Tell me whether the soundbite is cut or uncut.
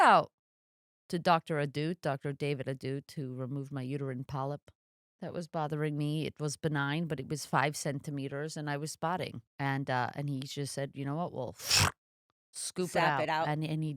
cut